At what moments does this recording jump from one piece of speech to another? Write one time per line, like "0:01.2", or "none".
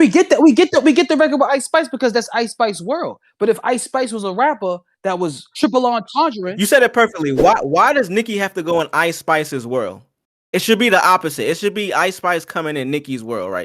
none